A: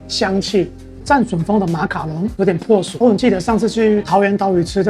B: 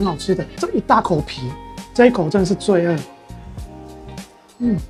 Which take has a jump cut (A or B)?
A